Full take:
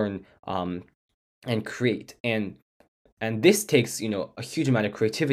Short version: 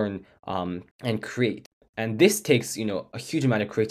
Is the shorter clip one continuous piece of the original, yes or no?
no